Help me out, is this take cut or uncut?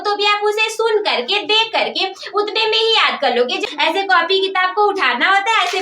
cut